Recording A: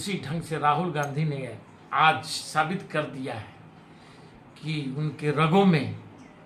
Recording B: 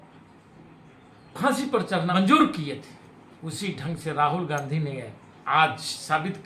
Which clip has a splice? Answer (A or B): B